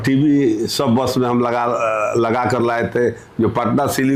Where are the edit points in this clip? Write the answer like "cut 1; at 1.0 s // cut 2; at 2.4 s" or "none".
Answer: none

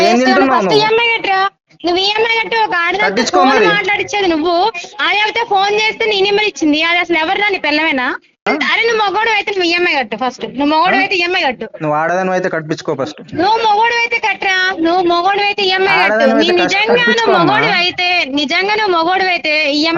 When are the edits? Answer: cut 1; at 8.4 s

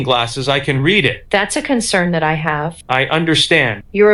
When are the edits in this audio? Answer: none

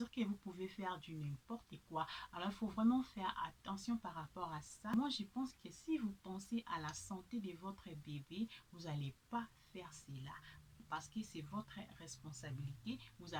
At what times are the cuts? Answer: none

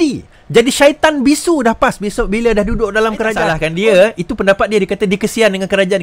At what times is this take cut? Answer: cut 1; at 3.6 s

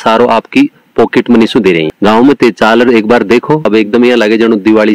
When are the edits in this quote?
cut 1; at 1.9 s // cut 2; at 3.6 s

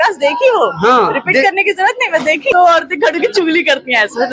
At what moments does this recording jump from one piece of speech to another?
cut 1; at 2.5 s

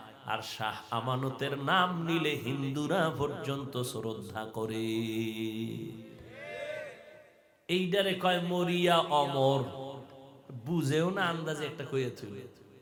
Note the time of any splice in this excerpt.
none

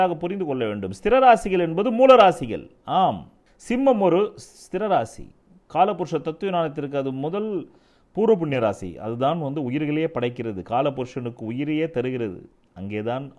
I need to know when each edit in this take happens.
none

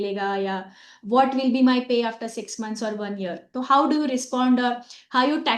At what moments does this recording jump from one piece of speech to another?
cut 1; at 3.5 s

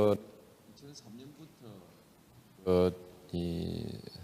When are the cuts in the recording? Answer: cut 1; at 1.2 s

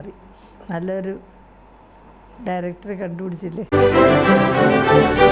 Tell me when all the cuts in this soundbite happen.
cut 1; at 3.7 s

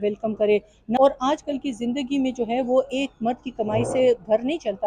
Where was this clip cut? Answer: cut 1; at 1.0 s

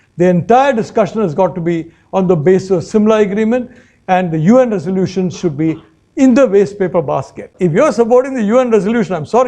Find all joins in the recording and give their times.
cut 1; at 7.4 s

